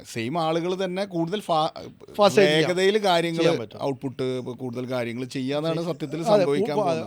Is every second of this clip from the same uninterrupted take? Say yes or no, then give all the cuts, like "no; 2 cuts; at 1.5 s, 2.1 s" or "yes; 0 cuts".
yes; 0 cuts